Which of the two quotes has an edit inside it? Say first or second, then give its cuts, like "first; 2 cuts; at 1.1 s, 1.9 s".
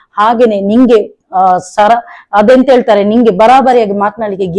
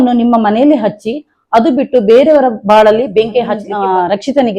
second; 1 cut; at 3.7 s